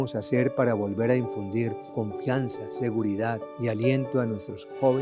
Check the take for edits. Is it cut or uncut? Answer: cut